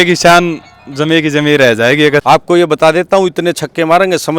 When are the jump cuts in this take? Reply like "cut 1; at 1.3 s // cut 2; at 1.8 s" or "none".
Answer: cut 1; at 2.2 s